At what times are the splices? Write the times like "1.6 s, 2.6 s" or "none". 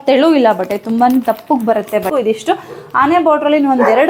2.1 s